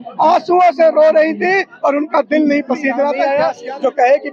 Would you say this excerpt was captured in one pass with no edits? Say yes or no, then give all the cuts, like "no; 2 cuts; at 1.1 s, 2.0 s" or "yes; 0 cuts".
no; 1 cut; at 3.2 s